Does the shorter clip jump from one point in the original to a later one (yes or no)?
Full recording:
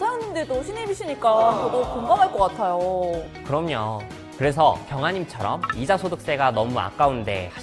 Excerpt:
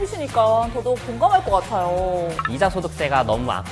yes